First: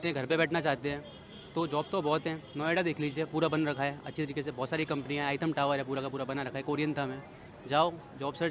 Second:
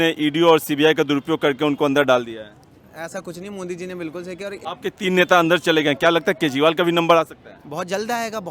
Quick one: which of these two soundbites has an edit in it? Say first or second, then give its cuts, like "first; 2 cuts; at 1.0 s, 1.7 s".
second; 1 cut; at 4.6 s